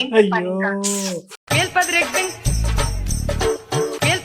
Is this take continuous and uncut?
yes; 0 cuts

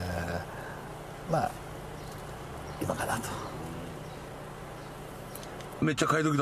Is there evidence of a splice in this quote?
no; 0 cuts

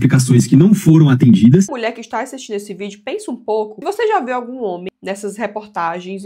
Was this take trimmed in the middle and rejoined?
yes; 2 cuts; at 1.7 s, 3.8 s

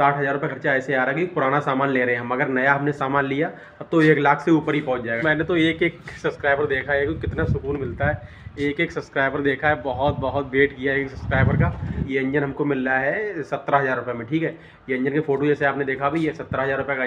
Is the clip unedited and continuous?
no; 2 cuts; at 5.2 s, 12.0 s

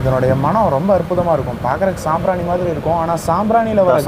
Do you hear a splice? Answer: no; 0 cuts

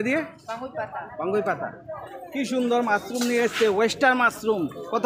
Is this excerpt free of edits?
yes; 0 cuts

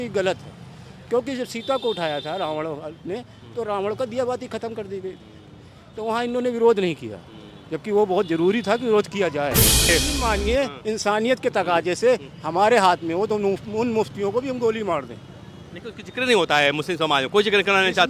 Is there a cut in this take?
yes; 1 cut; at 9.9 s

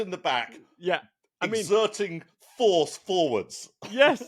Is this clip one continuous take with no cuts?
yes; 0 cuts

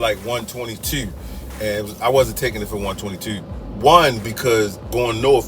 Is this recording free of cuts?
no; 1 cut; at 1.4 s

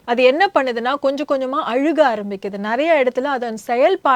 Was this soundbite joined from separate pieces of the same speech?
no; 0 cuts

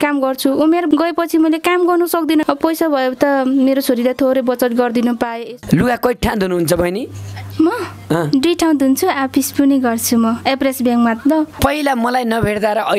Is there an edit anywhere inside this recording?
yes; 4 cuts; at 0.9 s, 2.4 s, 5.4 s, 11.5 s

